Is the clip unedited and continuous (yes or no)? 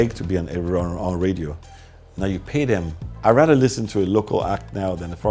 no